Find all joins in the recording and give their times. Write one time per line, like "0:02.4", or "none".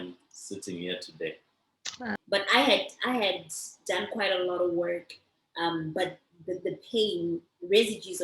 0:02.2